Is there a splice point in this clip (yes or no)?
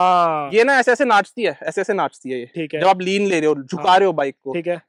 no